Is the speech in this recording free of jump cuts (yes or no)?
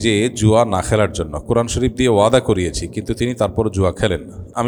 yes